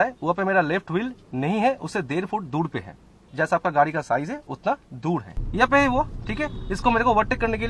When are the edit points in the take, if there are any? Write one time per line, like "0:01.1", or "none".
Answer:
0:03.2
0:05.3